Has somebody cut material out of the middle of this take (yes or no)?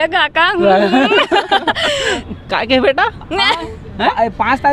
yes